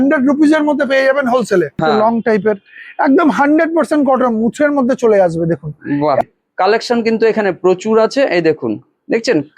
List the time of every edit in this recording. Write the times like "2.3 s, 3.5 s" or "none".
1.8 s, 6.2 s